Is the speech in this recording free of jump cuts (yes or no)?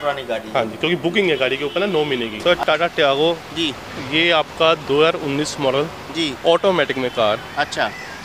no